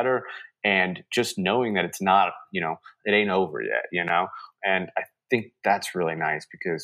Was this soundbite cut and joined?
yes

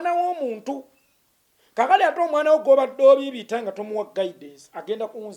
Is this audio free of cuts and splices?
yes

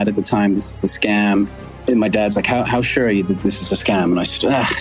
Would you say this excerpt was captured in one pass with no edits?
no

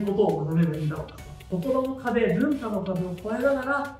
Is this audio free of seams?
no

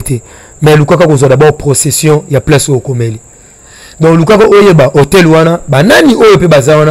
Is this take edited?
no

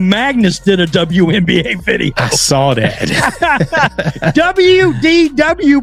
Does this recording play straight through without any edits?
yes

